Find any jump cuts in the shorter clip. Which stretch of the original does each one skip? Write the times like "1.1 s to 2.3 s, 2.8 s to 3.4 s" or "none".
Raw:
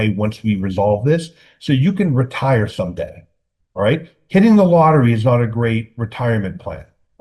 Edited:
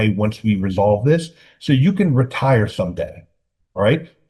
none